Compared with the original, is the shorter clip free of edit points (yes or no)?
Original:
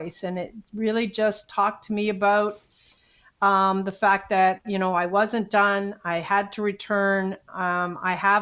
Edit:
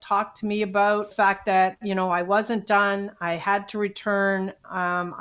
no